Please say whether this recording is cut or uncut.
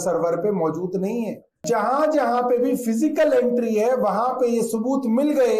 cut